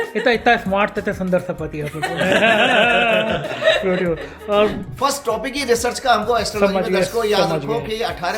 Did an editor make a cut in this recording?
yes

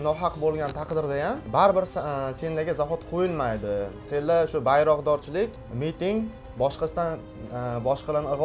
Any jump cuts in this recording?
no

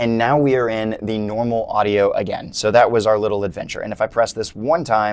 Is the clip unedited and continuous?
yes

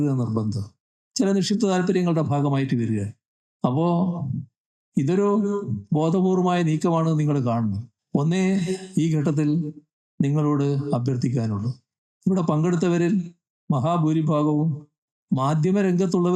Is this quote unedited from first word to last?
no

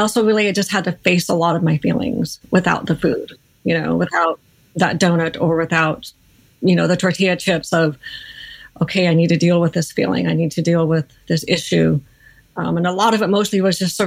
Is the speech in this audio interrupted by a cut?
no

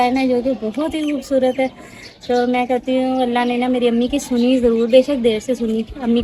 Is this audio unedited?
yes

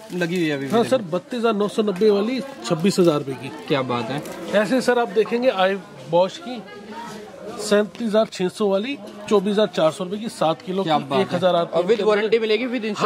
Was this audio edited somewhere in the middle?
no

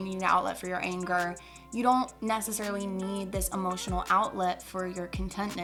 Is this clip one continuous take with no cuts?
yes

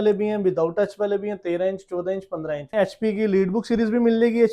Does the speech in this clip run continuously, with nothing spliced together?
no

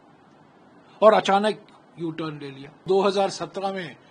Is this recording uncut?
no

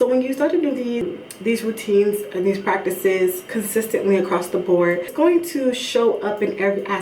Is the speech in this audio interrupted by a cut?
yes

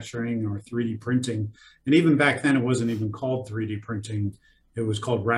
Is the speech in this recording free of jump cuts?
yes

